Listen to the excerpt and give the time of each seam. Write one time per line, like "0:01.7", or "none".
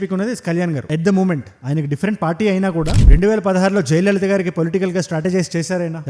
0:03.0